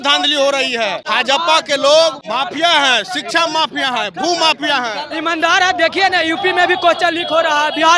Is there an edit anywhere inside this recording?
yes; 3 cuts; at 1.0 s, 2.2 s, 5.0 s

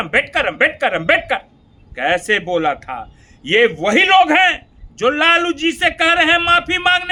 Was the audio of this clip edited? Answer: no; 0 cuts

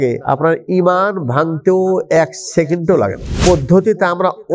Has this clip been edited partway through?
yes; 1 cut; at 3.3 s

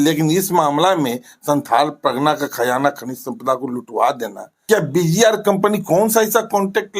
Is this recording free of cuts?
no; 1 cut; at 4.6 s

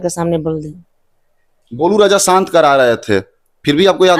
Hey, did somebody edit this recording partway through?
no; 0 cuts

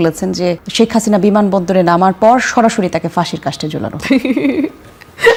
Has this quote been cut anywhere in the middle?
no; 0 cuts

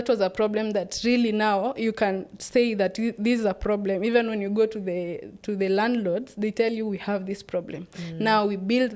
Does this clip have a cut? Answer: no; 0 cuts

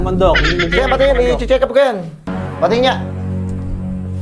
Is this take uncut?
no; 1 cut; at 2.3 s

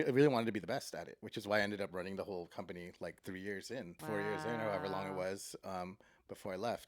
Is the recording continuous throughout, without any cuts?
no; 1 cut; at 4.0 s

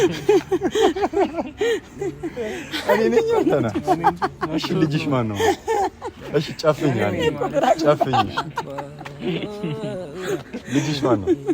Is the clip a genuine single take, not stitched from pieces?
yes; 0 cuts

